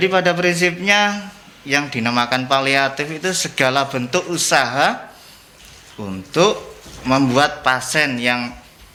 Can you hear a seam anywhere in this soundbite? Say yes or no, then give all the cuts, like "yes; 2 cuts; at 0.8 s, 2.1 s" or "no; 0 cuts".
no; 0 cuts